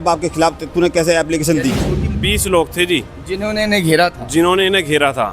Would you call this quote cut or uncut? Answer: cut